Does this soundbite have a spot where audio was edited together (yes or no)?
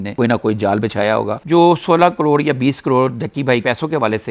yes